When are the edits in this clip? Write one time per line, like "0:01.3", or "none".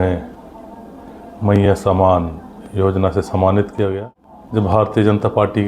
0:04.4